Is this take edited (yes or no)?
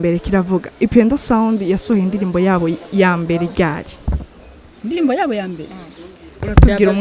no